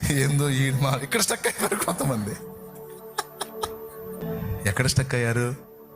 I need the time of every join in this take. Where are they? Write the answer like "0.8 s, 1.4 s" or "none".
4.2 s